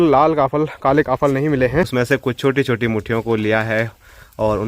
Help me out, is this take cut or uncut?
cut